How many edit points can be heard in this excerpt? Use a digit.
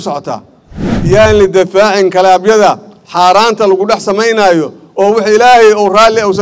1